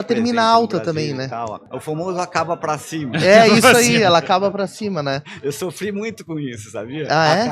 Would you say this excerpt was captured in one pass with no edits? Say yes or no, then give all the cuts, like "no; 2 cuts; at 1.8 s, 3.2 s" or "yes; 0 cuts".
no; 1 cut; at 1.7 s